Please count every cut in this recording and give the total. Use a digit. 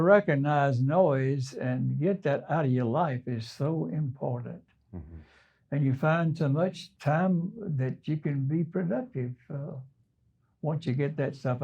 1